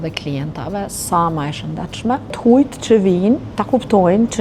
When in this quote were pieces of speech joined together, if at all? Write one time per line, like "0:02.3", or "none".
0:02.4
0:03.5